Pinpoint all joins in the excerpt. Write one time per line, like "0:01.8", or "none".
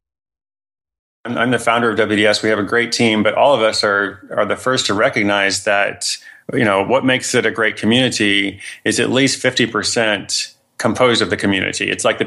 0:01.3